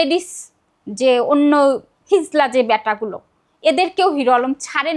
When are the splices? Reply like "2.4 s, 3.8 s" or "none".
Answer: none